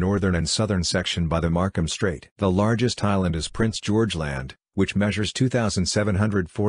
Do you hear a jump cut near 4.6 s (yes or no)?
no